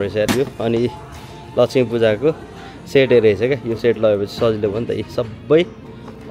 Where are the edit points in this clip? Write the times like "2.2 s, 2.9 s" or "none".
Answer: none